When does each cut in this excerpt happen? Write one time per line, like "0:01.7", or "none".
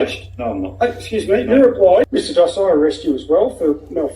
0:02.1